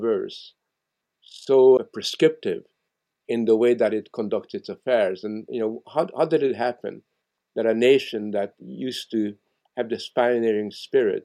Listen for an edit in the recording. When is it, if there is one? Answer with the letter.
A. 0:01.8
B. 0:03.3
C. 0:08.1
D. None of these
A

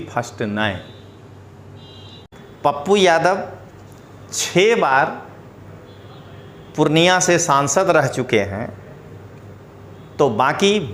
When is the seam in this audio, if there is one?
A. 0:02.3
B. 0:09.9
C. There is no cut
A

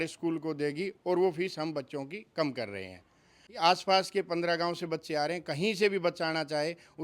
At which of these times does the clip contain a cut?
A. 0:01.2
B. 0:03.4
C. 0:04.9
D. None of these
B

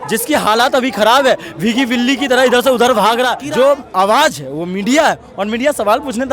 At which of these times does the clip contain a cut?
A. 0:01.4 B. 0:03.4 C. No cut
B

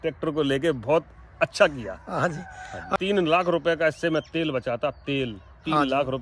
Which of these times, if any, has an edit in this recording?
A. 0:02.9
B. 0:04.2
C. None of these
A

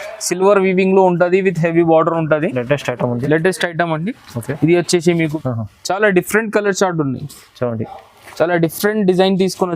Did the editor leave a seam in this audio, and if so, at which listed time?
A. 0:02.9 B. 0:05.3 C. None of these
B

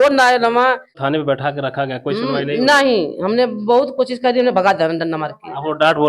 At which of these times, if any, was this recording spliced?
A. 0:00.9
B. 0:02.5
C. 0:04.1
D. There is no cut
A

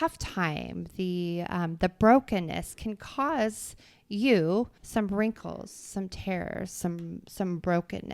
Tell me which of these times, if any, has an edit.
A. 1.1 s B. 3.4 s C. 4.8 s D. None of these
C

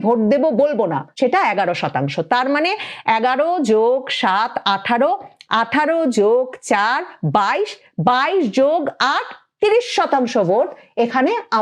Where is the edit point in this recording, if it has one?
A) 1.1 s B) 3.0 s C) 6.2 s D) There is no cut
A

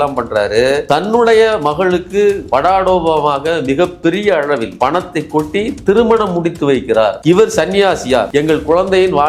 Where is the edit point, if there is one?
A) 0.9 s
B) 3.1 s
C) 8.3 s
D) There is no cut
C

